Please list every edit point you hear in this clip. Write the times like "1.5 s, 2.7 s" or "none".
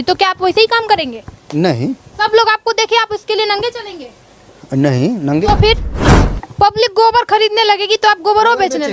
5.9 s